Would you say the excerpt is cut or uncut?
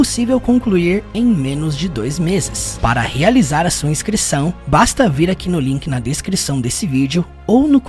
cut